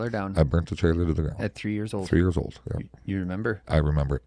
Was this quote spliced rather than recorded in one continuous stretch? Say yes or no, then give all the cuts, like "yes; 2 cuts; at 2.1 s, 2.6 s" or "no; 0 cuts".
no; 0 cuts